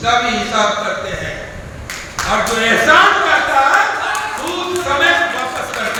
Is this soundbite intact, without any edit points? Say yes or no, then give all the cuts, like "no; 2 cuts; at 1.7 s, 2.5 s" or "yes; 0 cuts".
yes; 0 cuts